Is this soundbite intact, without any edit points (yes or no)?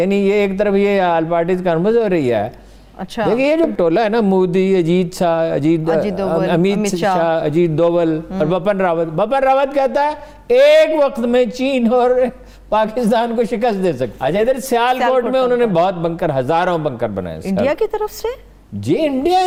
yes